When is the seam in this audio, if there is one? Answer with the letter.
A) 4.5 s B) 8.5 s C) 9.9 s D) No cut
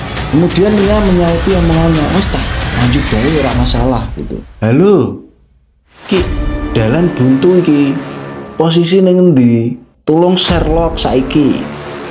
A